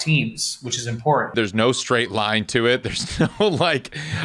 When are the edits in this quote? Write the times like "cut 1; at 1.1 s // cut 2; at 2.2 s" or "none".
cut 1; at 1.3 s